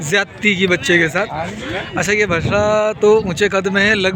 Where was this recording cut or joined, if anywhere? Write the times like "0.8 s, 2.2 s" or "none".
none